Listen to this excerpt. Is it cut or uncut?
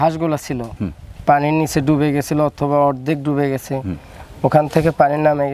uncut